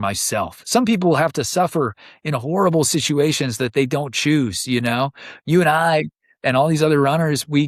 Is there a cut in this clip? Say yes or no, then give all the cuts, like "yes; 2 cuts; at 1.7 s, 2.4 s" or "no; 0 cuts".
no; 0 cuts